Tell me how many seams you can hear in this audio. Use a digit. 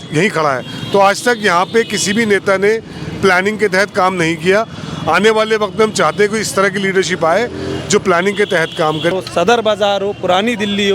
1